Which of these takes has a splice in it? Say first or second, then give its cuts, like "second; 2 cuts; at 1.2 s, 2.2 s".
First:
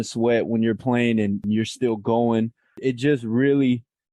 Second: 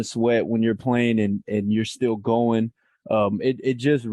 first; 2 cuts; at 1.4 s, 2.8 s